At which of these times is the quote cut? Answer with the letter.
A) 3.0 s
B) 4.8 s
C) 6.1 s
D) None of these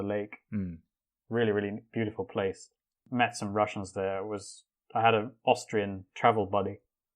A